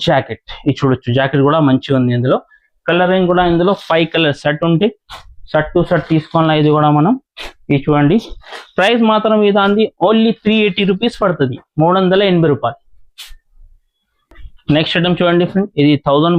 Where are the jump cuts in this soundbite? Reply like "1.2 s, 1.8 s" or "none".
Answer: none